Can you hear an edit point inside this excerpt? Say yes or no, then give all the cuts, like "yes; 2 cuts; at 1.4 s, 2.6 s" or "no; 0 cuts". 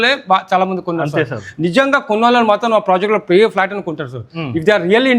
no; 0 cuts